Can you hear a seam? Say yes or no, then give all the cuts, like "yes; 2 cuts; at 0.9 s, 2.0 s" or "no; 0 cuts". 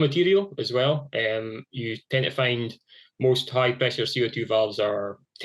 no; 0 cuts